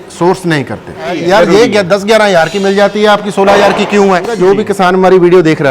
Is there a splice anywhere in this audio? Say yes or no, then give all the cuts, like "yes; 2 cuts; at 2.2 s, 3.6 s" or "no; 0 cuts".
yes; 2 cuts; at 1.2 s, 4.3 s